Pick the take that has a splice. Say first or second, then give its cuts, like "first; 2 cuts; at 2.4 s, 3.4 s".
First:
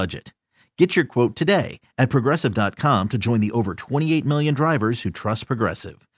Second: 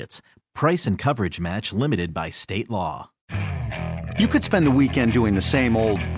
second; 1 cut; at 3.3 s